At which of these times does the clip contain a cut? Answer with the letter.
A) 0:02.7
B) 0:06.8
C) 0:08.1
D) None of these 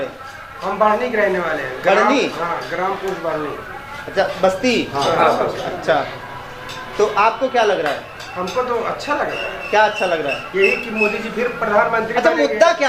D